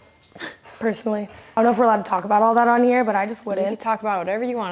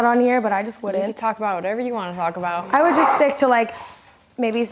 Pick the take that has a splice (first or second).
first